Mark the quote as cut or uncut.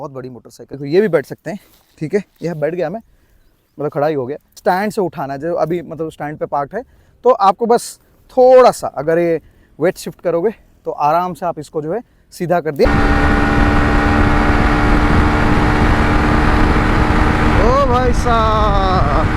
cut